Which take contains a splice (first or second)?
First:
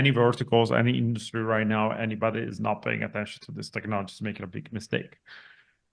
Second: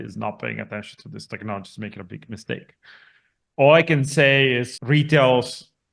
second